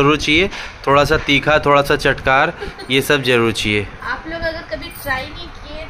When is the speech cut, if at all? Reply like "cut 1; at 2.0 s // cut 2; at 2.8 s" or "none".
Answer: none